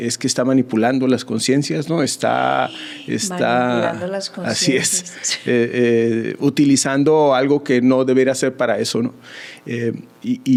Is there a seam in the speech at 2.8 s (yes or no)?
no